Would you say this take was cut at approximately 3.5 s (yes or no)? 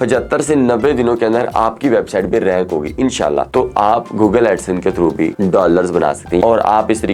yes